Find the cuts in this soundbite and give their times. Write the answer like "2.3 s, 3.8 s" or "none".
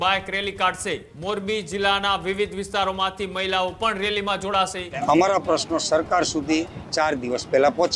1.1 s, 5.0 s